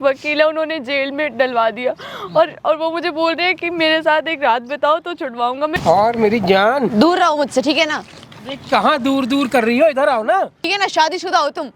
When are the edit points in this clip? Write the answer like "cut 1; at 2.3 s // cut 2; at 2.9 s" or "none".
cut 1; at 5.8 s // cut 2; at 10.7 s